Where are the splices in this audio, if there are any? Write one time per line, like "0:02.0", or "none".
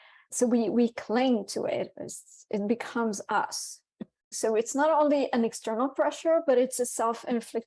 0:04.1